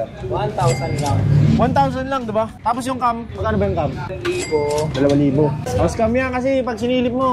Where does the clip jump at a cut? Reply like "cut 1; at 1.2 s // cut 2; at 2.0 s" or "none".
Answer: cut 1; at 4.1 s // cut 2; at 5.7 s